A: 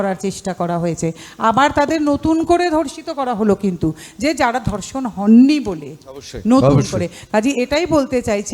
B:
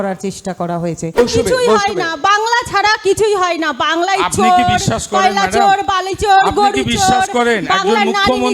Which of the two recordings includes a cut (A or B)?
B